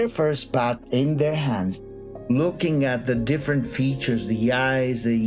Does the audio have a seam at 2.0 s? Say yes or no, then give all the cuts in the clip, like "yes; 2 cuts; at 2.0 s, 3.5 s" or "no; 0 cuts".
yes; 1 cut; at 2.0 s